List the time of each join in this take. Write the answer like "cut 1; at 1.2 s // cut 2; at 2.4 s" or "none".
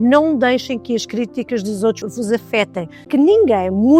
cut 1; at 2.0 s // cut 2; at 3.1 s